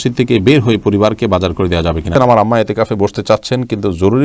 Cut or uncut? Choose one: cut